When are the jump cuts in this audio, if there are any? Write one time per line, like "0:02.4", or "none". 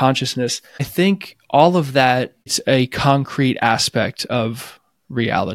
0:00.9
0:02.6

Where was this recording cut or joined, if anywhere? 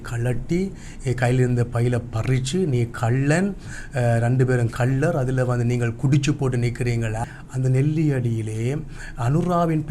0:07.2

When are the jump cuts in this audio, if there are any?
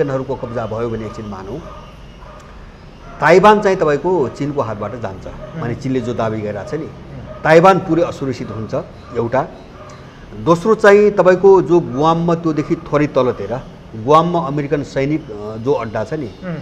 none

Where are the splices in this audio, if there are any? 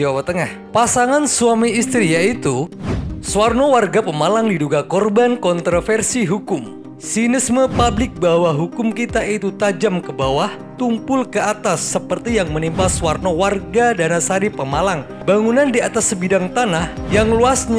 none

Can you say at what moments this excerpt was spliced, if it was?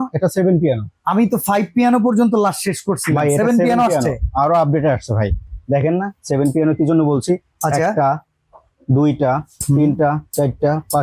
none

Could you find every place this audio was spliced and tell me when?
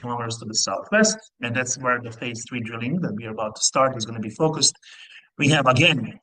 0:01.3

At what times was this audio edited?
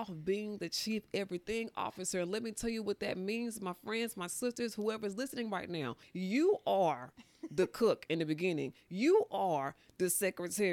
0:06.0

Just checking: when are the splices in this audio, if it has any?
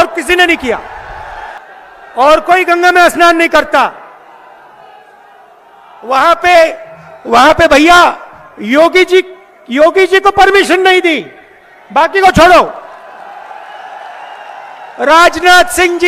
none

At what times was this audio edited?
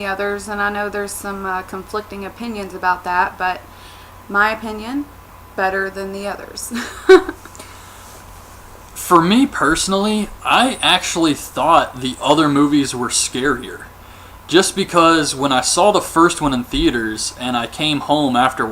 0:15.0

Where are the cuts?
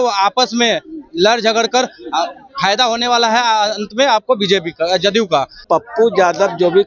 0:05.6

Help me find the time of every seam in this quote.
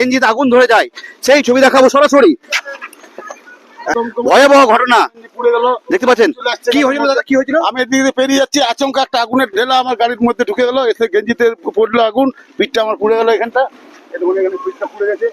0:03.9

